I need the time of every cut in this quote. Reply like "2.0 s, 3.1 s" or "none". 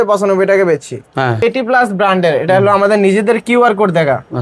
1.4 s